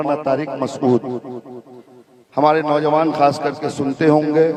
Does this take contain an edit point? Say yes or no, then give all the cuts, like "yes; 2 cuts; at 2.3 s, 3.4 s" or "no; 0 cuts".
no; 0 cuts